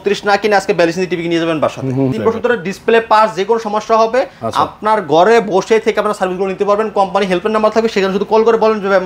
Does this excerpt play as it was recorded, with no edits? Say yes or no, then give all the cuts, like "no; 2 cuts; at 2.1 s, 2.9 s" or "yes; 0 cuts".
no; 1 cut; at 2.1 s